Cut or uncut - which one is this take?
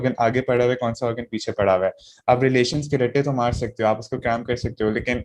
uncut